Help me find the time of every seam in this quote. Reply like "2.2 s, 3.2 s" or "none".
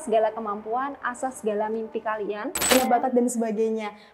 2.7 s